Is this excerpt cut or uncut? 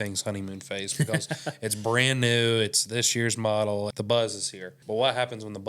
cut